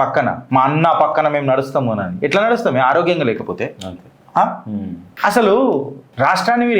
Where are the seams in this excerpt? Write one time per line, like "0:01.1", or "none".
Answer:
none